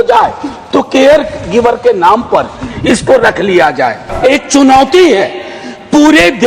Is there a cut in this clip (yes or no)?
yes